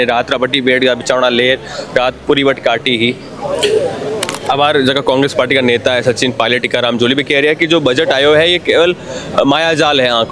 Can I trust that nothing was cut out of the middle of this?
no; 1 cut; at 4.3 s

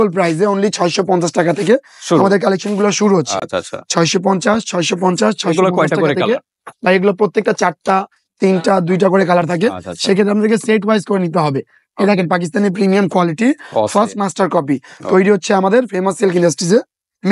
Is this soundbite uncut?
yes; 0 cuts

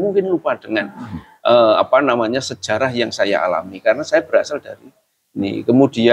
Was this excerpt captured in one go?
yes; 0 cuts

